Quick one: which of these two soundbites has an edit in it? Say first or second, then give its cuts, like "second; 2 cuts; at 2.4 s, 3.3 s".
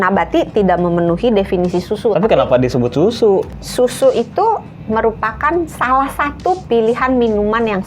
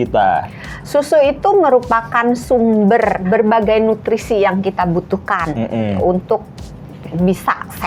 first; 2 cuts; at 3.5 s, 6.6 s